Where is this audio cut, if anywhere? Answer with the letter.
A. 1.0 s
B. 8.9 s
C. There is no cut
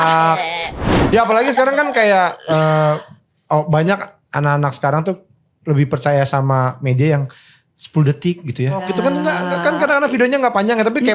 A